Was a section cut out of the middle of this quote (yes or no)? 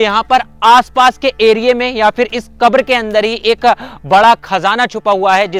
no